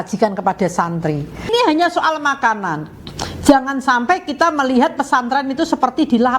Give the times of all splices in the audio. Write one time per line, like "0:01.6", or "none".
0:01.5